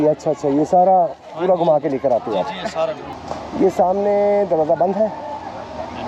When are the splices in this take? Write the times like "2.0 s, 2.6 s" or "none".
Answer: 3.1 s